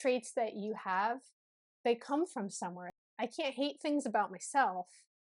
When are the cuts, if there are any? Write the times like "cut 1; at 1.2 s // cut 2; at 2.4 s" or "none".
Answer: cut 1; at 2.9 s